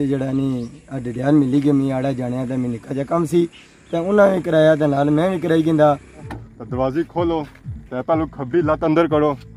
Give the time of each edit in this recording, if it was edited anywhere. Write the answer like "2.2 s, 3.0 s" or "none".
6.3 s